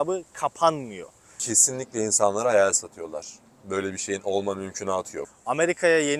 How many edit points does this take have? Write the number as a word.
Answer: two